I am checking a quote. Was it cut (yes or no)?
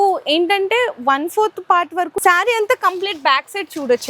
yes